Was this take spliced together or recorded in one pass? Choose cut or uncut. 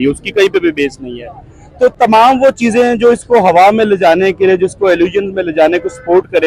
uncut